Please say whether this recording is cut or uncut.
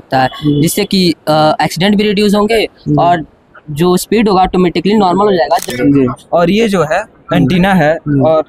cut